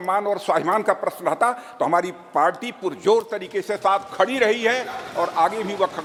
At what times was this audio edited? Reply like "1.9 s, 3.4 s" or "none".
none